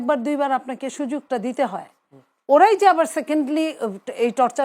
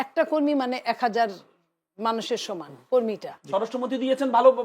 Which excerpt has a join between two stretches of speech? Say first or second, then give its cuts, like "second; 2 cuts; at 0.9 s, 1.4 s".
second; 1 cut; at 3.3 s